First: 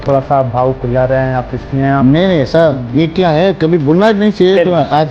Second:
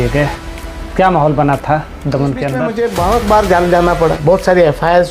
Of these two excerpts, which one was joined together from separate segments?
second; 1 cut; at 2.7 s

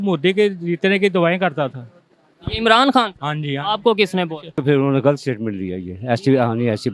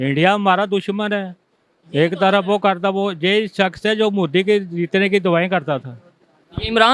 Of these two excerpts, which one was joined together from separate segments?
first; 1 cut; at 4.6 s

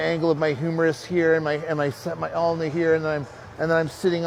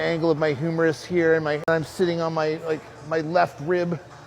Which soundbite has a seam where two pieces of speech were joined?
second; 1 cut; at 1.7 s

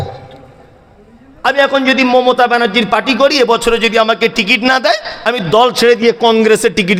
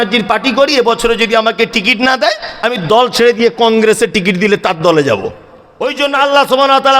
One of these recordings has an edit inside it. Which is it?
second; 1 cut; at 6.1 s

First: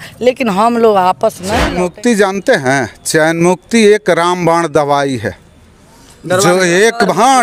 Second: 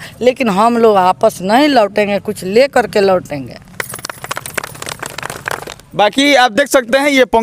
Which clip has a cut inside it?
first; 1 cut; at 1.6 s

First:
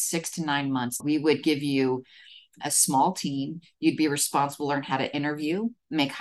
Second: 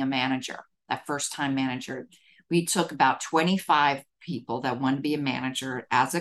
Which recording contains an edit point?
first; 2 cuts; at 1.0 s, 2.6 s

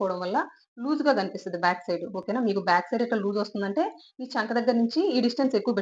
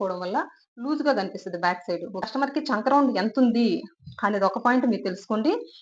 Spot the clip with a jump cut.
second; 1 cut; at 2.2 s

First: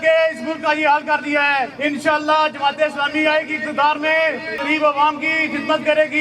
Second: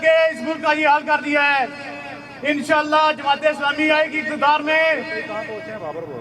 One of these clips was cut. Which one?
first; 2 cuts; at 1.7 s, 4.6 s

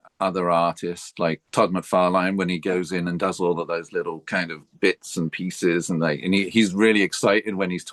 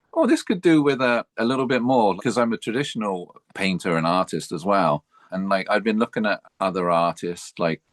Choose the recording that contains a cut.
second; 2 cuts; at 2.2 s, 5.3 s

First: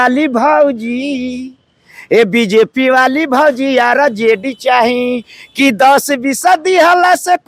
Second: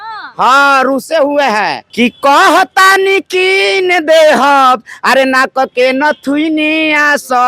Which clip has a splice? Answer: second; 1 cut; at 1.8 s

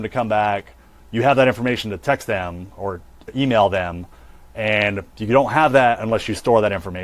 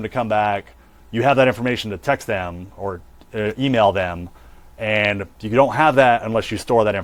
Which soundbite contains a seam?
first; 1 cut; at 3.3 s

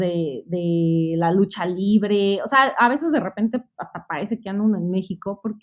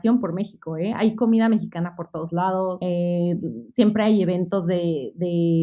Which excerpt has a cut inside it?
second; 1 cut; at 2.8 s

